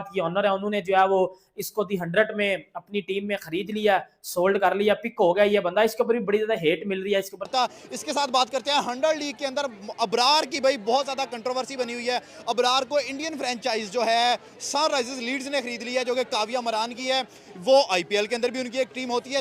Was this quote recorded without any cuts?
no; 1 cut; at 7.4 s

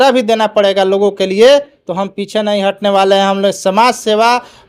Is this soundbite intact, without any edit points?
yes; 0 cuts

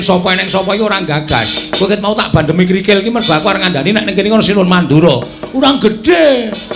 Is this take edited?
no; 0 cuts

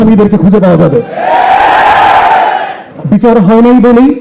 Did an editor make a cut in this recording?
yes; 1 cut; at 2.8 s

